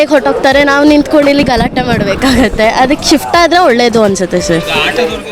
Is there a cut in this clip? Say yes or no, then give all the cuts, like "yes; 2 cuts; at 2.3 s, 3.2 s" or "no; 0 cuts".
no; 0 cuts